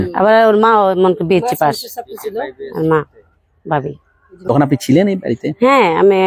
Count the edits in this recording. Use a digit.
1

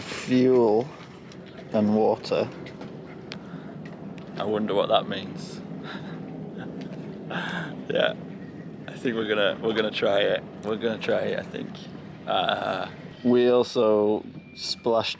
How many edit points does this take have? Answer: 0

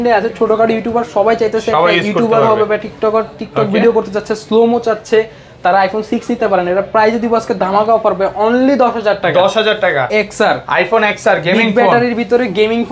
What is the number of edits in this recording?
1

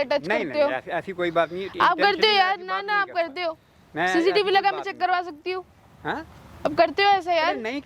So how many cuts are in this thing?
0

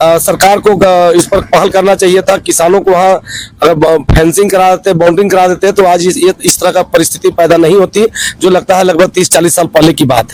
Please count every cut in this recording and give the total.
0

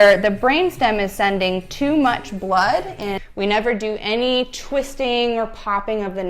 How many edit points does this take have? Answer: 1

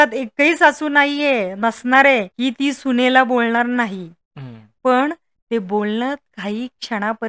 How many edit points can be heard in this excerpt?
1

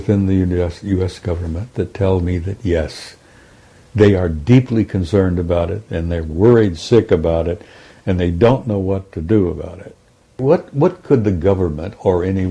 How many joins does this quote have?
1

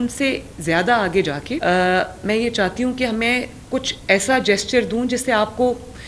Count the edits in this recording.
1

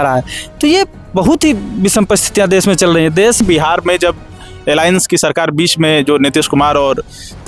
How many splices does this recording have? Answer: 1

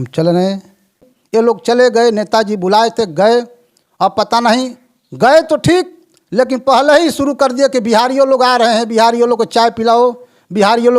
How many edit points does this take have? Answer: 1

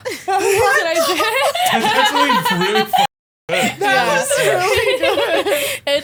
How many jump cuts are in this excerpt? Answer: 0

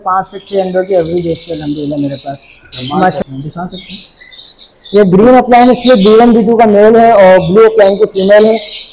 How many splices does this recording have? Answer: 1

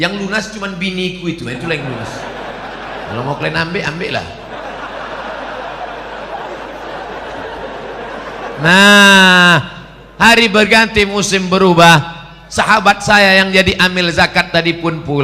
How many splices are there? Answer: 1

